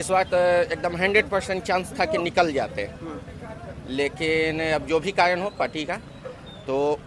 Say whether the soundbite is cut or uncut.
uncut